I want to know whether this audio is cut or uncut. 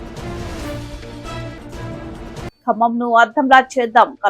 cut